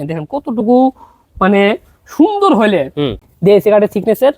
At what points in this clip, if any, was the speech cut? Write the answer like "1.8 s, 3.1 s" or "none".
3.2 s